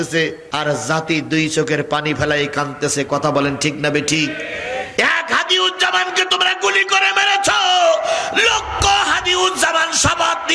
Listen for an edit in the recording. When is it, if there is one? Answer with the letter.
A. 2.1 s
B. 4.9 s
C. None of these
B